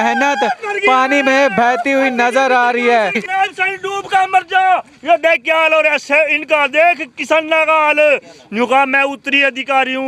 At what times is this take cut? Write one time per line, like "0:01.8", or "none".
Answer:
0:03.2